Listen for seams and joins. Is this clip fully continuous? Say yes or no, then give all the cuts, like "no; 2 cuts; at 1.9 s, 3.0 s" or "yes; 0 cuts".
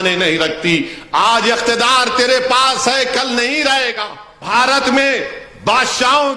no; 1 cut; at 4.5 s